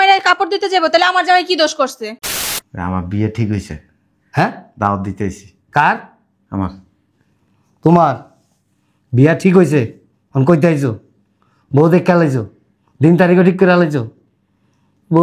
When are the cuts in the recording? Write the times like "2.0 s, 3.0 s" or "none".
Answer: 2.3 s